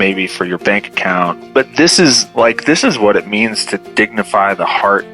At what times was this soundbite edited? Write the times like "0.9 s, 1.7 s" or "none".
1.4 s